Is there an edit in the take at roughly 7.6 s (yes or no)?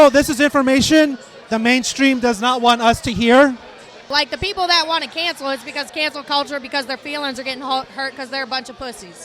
no